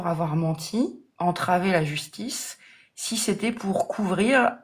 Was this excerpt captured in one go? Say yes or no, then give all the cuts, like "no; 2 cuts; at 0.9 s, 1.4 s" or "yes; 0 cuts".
yes; 0 cuts